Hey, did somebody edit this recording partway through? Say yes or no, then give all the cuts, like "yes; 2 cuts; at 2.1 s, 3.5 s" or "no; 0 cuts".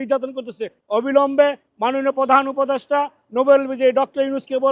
no; 0 cuts